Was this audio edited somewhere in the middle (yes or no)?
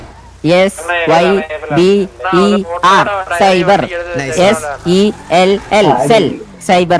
no